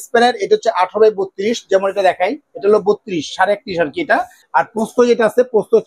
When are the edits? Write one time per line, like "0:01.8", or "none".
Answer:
0:04.4